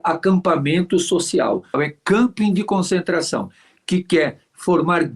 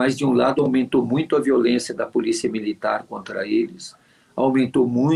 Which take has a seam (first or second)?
first